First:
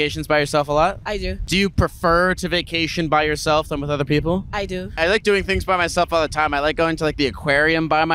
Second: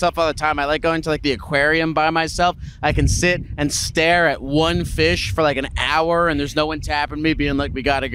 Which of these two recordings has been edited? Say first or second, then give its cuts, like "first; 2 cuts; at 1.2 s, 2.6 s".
first; 2 cuts; at 1.3 s, 5.0 s